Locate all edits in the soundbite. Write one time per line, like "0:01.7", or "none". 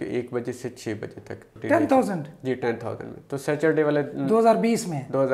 0:01.5

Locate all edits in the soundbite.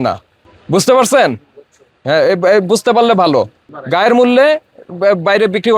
none

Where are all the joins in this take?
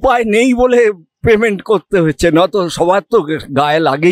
none

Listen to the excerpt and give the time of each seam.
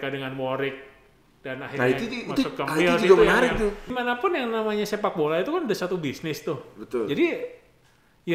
0:03.9

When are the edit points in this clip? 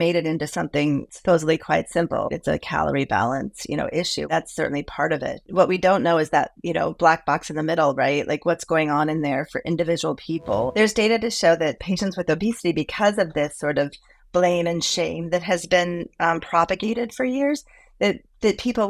0:01.1
0:02.3
0:04.3
0:05.4
0:10.7

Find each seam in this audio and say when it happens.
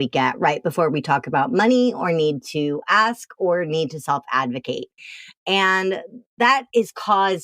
none

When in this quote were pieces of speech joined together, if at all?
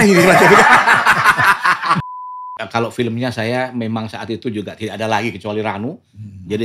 0:02.1

